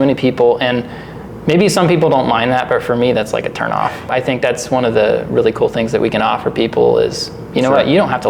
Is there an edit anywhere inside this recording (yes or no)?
yes